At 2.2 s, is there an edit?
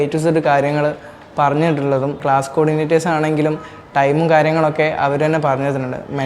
yes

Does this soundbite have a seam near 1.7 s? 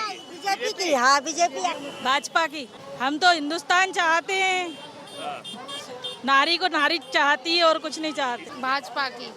yes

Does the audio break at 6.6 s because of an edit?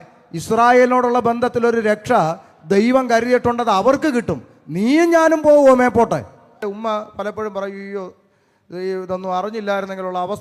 yes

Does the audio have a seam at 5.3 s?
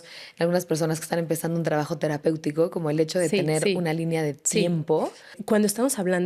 yes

